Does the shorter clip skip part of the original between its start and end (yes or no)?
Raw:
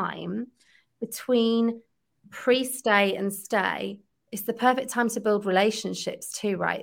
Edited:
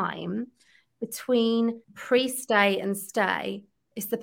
yes